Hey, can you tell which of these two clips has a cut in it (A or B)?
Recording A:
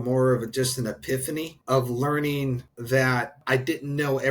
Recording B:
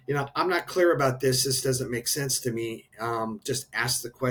A